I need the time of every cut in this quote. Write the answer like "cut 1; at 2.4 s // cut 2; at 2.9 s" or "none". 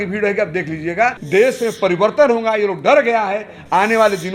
cut 1; at 1.2 s